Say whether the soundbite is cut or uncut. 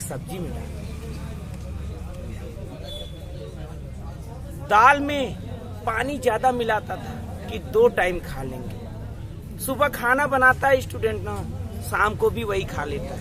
uncut